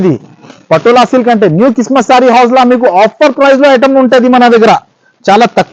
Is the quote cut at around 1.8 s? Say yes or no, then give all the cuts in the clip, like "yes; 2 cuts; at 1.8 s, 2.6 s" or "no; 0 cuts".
no; 0 cuts